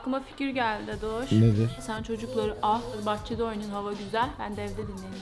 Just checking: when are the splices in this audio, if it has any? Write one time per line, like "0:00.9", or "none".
0:01.8
0:03.0